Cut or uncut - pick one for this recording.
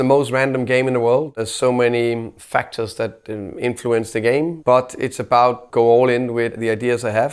cut